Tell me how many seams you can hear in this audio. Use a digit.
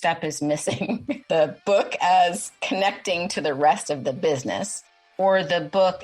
2